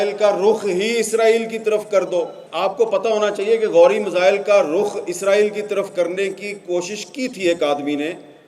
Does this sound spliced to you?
yes; 1 cut; at 2.4 s

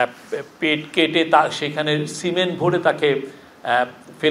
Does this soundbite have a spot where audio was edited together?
no; 0 cuts

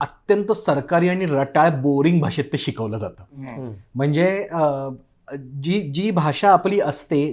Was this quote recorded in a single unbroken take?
yes; 0 cuts

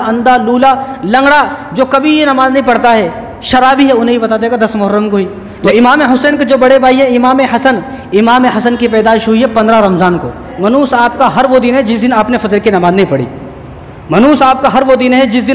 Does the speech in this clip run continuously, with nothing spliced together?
no; 2 cuts; at 5.5 s, 10.5 s

